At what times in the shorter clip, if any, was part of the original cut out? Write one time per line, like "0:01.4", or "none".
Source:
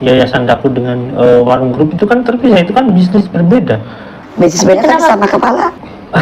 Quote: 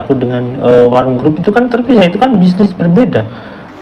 none